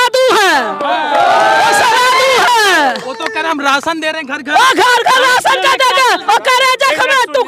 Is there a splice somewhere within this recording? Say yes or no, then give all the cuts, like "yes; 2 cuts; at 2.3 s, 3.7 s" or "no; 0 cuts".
yes; 1 cut; at 6.2 s